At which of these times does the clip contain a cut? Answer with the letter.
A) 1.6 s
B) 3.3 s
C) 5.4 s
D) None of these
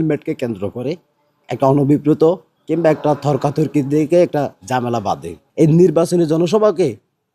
C